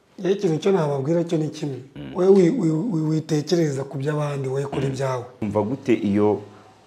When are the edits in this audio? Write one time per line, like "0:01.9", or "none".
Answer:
0:05.4